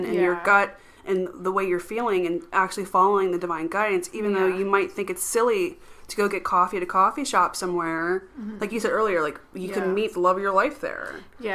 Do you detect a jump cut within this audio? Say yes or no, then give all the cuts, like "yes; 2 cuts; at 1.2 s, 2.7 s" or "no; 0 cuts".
no; 0 cuts